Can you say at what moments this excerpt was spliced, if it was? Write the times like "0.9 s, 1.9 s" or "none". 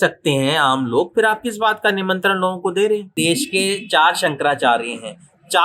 3.1 s